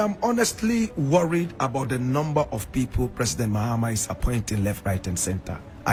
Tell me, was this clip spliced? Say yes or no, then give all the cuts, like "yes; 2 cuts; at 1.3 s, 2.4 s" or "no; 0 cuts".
no; 0 cuts